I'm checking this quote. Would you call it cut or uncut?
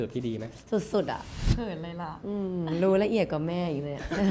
cut